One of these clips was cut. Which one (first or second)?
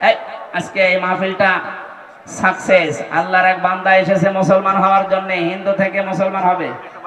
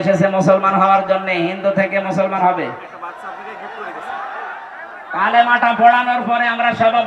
second